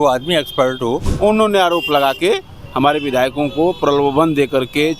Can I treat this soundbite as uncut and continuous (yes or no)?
no